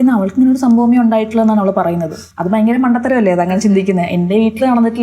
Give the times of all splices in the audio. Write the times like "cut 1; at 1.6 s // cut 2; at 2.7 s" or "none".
cut 1; at 2.2 s